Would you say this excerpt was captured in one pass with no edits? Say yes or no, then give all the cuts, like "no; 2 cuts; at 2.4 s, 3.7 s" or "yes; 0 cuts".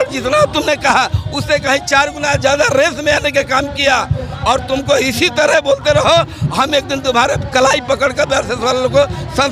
yes; 0 cuts